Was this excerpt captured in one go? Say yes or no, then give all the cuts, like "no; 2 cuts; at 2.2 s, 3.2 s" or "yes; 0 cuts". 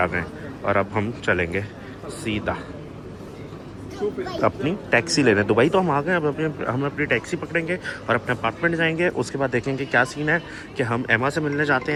yes; 0 cuts